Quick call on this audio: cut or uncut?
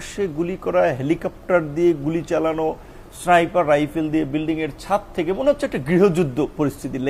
uncut